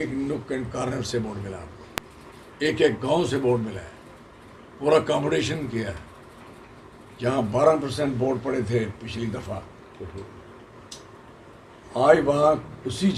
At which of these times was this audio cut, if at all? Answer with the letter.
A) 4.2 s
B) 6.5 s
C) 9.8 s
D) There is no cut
D